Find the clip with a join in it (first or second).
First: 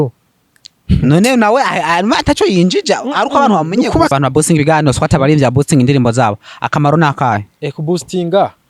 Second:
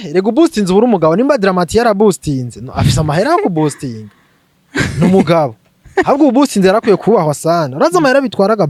first